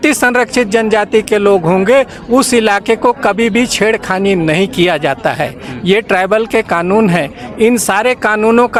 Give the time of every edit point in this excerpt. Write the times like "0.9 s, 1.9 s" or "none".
none